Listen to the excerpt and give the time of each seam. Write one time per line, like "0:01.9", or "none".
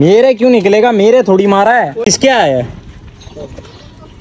none